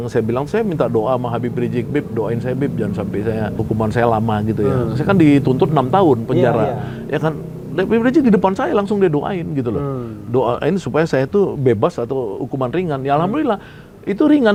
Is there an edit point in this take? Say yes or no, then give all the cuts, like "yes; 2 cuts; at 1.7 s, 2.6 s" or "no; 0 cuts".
no; 0 cuts